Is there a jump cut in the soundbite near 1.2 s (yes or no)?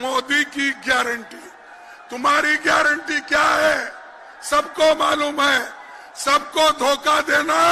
no